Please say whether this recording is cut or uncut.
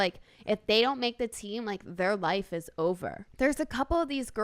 cut